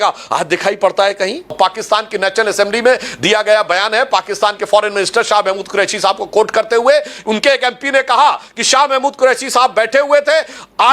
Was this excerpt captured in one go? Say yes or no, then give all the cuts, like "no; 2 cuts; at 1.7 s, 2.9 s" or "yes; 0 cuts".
no; 1 cut; at 1.5 s